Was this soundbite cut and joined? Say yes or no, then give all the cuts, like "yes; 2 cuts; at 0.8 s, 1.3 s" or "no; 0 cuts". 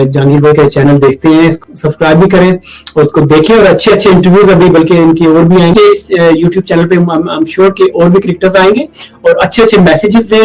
yes; 2 cuts; at 1.6 s, 5.7 s